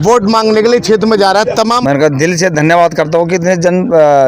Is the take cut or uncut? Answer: cut